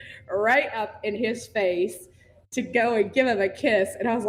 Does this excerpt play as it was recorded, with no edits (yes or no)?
yes